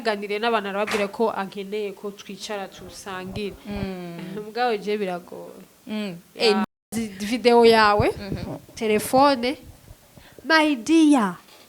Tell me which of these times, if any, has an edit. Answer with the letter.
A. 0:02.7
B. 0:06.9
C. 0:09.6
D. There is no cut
B